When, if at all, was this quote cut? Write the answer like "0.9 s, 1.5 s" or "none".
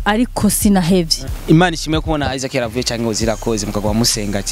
1.2 s